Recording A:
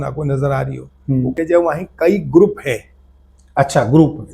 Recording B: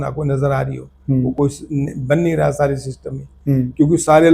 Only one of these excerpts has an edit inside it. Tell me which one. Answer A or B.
A